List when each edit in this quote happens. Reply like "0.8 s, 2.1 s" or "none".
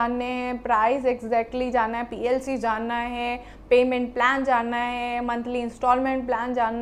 none

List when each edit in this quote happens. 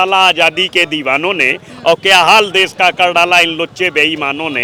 none

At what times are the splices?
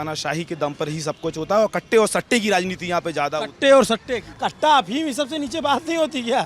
4.2 s

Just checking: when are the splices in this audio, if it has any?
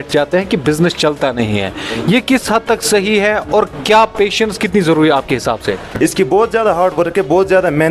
5.9 s

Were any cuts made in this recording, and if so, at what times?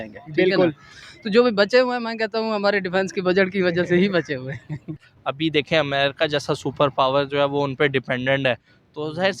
5.0 s

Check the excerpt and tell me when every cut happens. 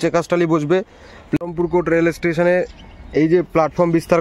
1.4 s

